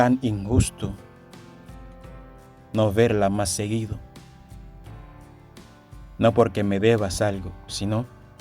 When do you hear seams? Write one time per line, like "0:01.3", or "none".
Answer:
0:01.0
0:02.6